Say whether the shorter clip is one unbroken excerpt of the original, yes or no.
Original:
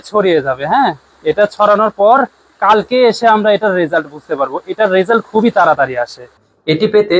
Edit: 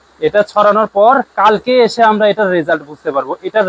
no